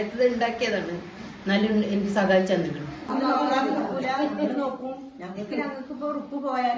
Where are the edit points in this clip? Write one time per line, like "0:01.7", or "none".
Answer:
0:03.1

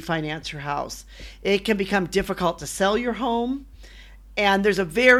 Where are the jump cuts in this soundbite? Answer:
none

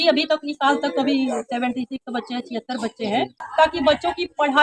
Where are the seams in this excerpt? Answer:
0:03.4

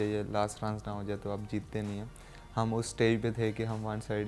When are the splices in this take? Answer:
none

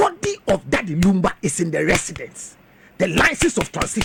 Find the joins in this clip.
none

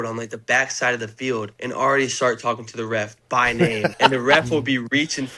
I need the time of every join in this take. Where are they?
0:01.5
0:03.9

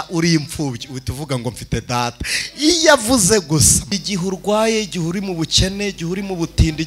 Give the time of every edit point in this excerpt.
0:03.9

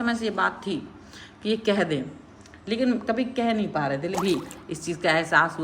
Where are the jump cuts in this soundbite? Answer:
0:04.2

